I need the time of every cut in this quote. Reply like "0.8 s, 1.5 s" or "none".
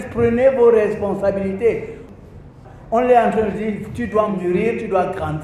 2.3 s, 4.4 s